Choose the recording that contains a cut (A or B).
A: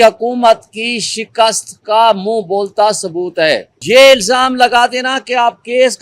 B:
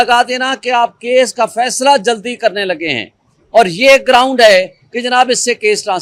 A